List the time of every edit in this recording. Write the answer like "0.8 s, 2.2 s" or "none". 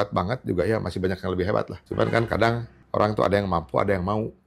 1.8 s, 2.7 s